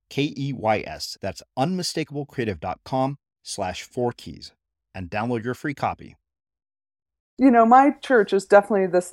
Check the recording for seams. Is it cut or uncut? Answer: cut